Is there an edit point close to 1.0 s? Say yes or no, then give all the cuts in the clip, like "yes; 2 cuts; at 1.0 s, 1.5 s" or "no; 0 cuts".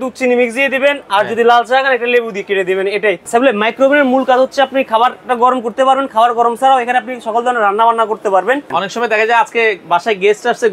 no; 2 cuts; at 3.2 s, 8.7 s